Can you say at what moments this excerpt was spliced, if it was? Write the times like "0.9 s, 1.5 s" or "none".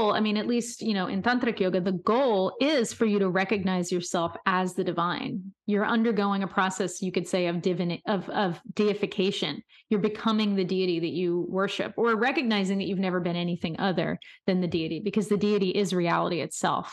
none